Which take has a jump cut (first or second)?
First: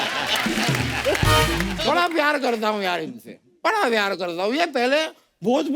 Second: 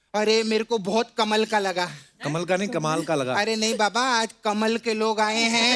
first